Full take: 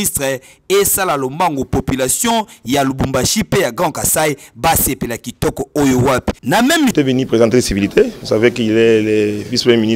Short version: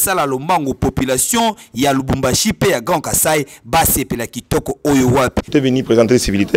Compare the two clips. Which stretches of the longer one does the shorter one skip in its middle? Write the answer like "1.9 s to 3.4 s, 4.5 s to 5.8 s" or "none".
6.4 s to 6.9 s